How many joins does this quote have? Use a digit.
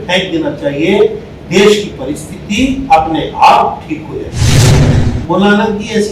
1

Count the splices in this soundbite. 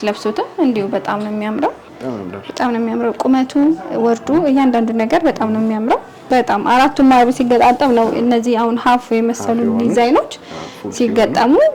2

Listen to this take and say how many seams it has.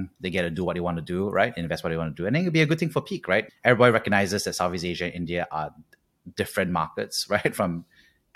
1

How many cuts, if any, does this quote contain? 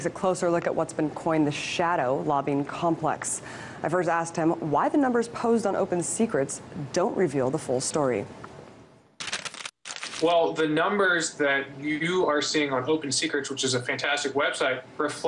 0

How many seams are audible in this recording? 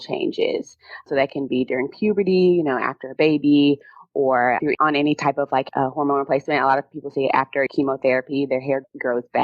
1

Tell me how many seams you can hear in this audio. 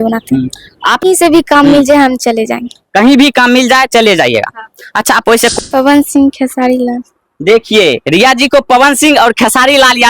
2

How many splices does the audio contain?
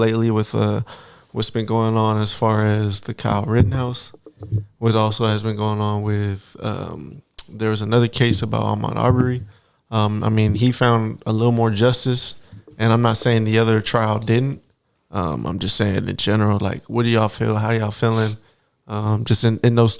0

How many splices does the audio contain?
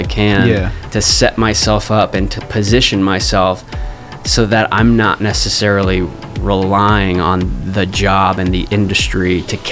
0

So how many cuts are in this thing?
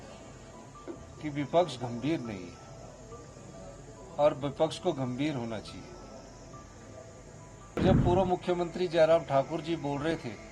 1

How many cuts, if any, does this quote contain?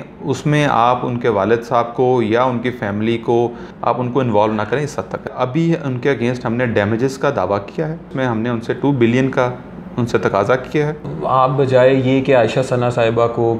4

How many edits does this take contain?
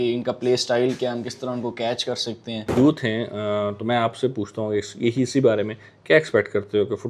1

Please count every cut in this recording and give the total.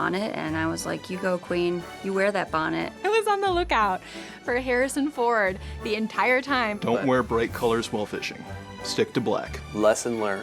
2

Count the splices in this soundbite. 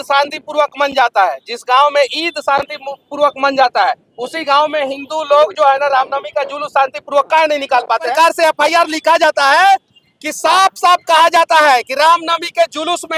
1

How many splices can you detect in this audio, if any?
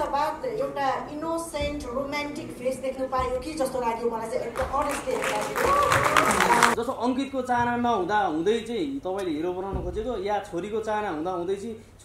1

